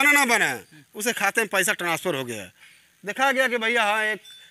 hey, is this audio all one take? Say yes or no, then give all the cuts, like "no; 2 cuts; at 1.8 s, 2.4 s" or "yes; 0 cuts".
yes; 0 cuts